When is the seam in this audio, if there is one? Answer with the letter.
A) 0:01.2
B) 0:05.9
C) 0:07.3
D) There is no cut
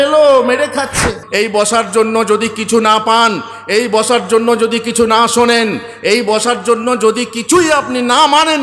A